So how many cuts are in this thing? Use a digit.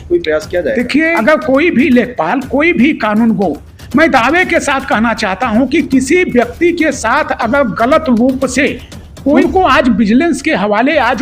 2